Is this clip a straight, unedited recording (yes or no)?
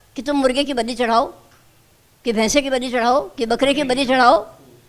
yes